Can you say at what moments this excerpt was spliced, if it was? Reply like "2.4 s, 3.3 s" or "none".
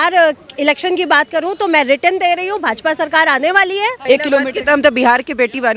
4.0 s